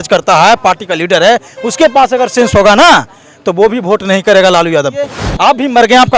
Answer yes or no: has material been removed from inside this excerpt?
yes